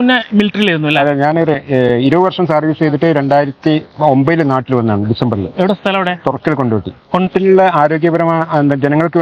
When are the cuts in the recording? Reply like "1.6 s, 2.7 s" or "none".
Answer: none

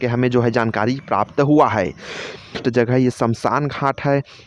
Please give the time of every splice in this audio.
2.6 s

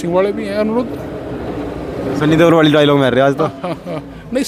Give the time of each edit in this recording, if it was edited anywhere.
none

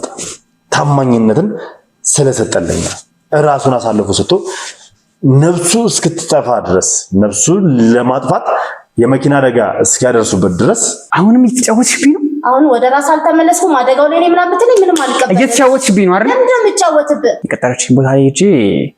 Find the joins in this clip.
11.0 s, 17.4 s

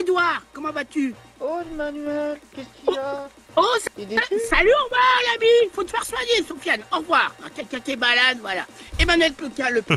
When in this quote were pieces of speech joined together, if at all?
1.3 s

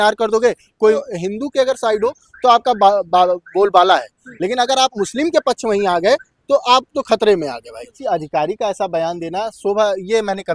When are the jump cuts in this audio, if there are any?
1.0 s, 7.9 s

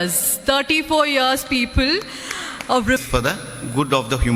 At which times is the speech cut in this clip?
3.0 s

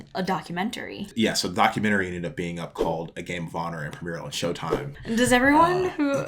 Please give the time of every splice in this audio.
1.1 s, 4.9 s

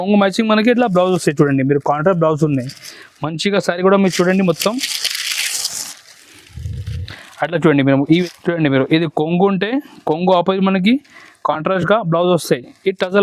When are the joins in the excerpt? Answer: 8.2 s

